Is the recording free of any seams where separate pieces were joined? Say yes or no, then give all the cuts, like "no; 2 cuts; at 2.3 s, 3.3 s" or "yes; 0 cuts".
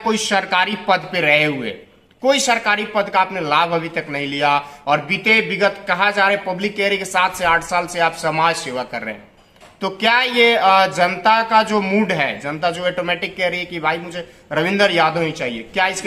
yes; 0 cuts